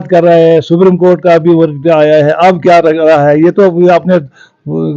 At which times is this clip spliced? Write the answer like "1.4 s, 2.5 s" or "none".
none